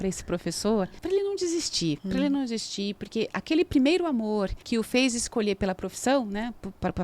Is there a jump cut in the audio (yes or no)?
yes